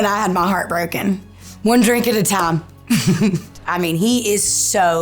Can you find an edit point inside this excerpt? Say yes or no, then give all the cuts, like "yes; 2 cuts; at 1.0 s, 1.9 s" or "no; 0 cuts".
yes; 2 cuts; at 1.3 s, 3.6 s